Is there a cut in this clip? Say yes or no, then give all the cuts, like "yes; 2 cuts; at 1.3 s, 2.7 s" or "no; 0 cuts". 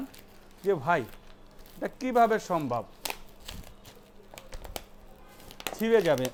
no; 0 cuts